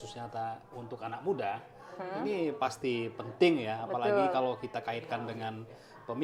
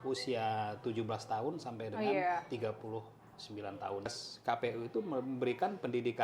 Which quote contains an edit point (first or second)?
second